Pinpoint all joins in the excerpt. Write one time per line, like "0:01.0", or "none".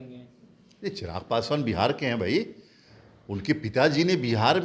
none